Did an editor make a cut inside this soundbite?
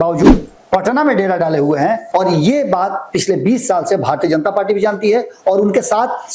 yes; 1 cut; at 2.0 s

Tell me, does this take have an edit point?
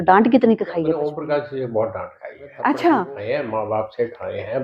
yes; 2 cuts; at 1.0 s, 3.2 s

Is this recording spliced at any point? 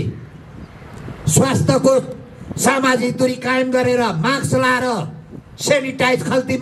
no; 0 cuts

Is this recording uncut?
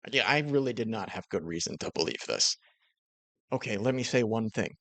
no; 1 cut; at 3.3 s

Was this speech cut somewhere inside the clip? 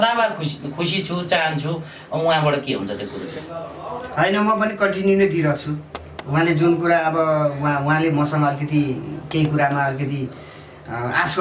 no; 0 cuts

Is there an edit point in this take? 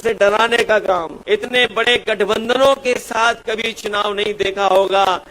yes; 1 cut; at 1.2 s

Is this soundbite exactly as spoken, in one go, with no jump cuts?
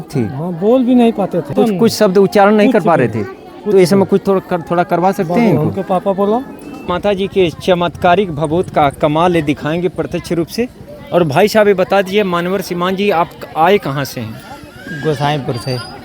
no; 2 cuts; at 1.5 s, 6.8 s

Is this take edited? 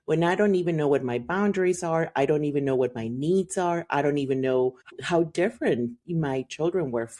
yes; 1 cut; at 5.0 s

